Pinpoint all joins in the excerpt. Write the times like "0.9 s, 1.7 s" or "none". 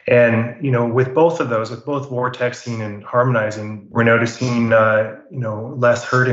none